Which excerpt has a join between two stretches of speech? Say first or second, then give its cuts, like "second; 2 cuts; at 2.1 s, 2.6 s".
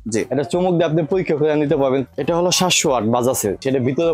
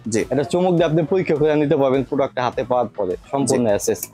first; 1 cut; at 2.1 s